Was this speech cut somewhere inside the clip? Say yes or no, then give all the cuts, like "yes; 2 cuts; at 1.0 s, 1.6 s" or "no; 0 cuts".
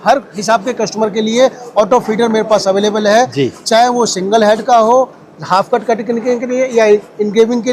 no; 0 cuts